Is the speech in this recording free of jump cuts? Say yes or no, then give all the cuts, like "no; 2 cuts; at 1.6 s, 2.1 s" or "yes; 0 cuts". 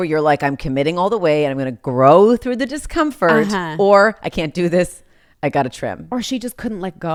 yes; 0 cuts